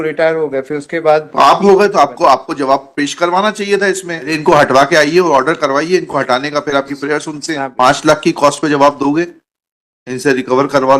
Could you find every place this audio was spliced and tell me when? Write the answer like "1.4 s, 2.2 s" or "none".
4.4 s, 7.7 s